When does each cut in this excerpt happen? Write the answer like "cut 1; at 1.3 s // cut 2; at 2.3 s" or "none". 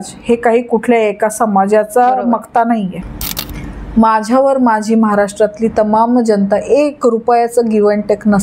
cut 1; at 3.0 s

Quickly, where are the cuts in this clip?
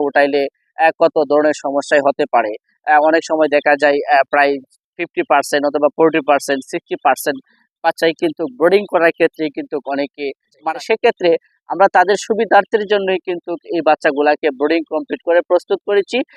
cut 1; at 10.6 s

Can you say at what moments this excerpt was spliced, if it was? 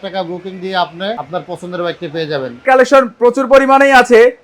cut 1; at 1.2 s // cut 2; at 2.7 s

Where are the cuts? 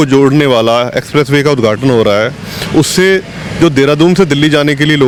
none

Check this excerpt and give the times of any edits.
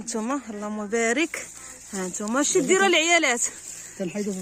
none

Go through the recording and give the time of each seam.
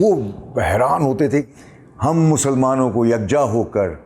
cut 1; at 1.5 s

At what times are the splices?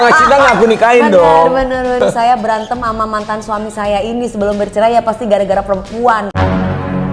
cut 1; at 2.0 s

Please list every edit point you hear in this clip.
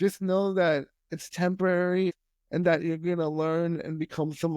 cut 1; at 2.2 s

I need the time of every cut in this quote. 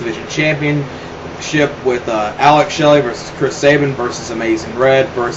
cut 1; at 2.5 s

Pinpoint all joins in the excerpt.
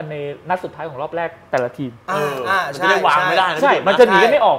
none

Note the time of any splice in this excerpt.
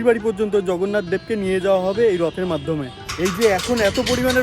cut 1; at 2.9 s

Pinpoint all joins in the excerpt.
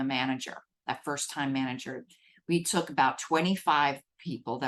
none

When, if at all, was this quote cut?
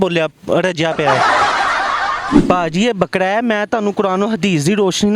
cut 1; at 2.3 s

